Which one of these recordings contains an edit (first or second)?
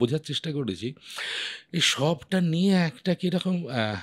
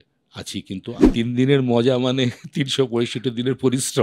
second